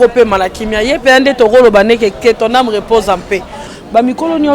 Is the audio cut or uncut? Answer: cut